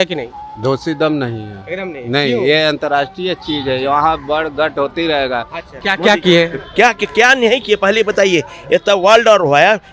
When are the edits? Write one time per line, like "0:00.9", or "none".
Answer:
0:05.6